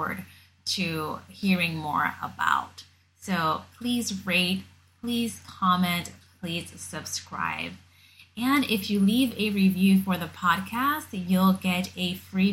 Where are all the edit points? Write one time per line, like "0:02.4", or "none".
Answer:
none